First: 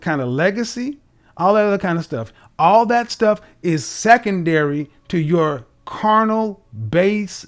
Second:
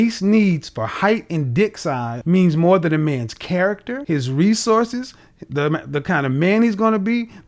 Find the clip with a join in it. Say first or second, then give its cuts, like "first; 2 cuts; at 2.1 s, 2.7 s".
second; 2 cuts; at 2.1 s, 3.9 s